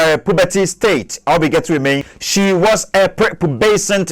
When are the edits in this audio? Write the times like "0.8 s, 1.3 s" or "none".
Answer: 2.2 s